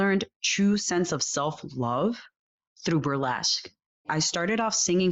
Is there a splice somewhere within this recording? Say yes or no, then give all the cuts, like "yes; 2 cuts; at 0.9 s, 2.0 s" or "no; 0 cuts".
yes; 1 cut; at 4.1 s